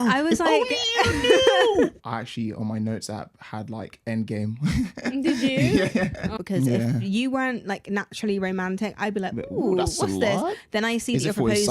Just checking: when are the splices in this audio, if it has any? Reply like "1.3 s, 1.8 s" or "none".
2.1 s, 6.3 s